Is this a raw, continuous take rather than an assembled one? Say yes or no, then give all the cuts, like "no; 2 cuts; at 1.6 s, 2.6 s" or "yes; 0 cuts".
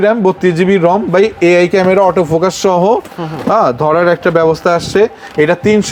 yes; 0 cuts